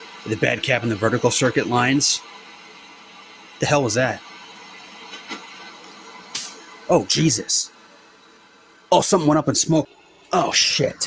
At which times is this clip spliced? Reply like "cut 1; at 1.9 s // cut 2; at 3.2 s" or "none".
cut 1; at 9.9 s